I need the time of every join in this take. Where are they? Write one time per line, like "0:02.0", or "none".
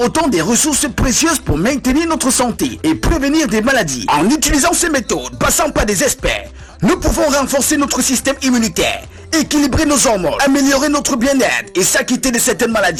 none